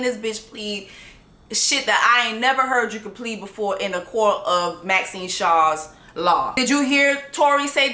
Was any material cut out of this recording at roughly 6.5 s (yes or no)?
yes